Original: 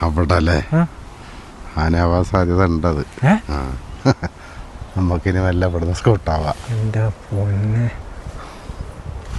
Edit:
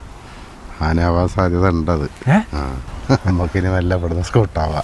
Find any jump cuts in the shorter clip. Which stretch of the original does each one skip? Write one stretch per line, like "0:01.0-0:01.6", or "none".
0:04.2-0:05.0